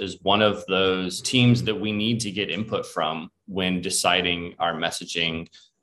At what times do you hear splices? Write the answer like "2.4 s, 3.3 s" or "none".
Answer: 1.2 s